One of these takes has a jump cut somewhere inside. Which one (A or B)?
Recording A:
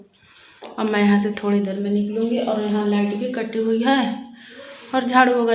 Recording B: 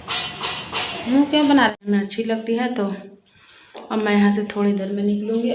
B